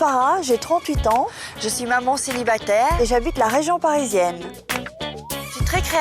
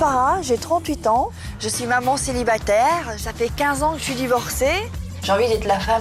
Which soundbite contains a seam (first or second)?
second